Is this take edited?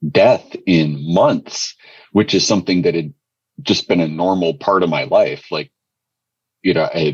no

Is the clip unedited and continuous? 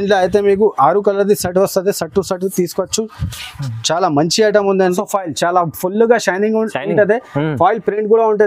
no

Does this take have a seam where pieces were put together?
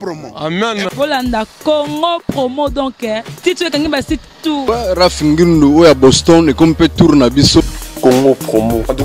yes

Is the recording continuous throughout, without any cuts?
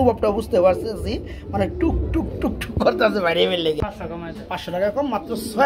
no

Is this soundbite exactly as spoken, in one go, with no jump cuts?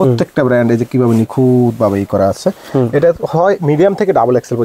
yes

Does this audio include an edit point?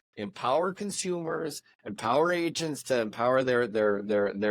no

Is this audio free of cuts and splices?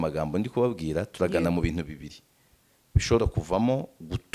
yes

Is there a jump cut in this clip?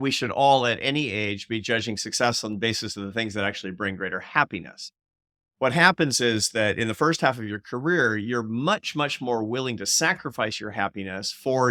no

